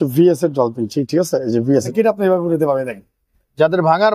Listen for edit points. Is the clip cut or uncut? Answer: cut